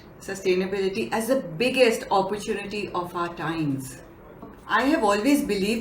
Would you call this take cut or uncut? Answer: cut